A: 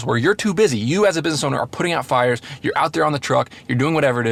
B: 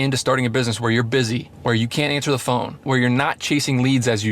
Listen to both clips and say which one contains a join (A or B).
B